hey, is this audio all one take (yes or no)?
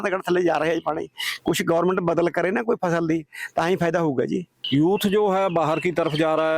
no